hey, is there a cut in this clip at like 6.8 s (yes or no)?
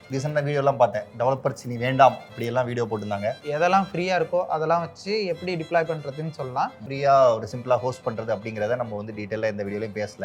yes